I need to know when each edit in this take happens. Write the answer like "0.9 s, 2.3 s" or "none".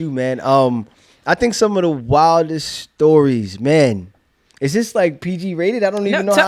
none